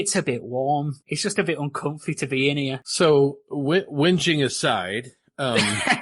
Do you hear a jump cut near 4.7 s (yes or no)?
no